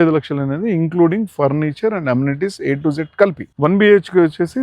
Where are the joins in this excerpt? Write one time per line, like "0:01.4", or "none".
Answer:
0:03.4